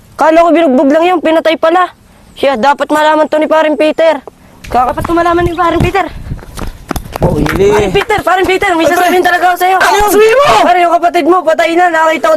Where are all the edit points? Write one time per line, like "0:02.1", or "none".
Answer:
0:04.9
0:07.4
0:10.1